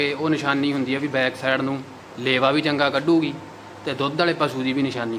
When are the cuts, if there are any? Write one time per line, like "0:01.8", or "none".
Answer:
none